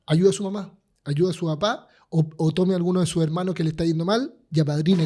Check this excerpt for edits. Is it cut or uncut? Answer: uncut